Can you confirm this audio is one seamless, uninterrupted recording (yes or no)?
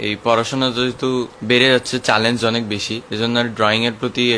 no